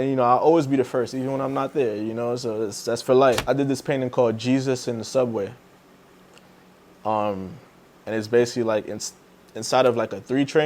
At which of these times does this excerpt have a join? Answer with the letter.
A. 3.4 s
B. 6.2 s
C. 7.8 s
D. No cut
A